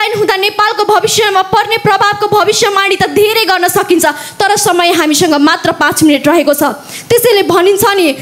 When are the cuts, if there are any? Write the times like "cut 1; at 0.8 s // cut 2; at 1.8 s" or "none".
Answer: none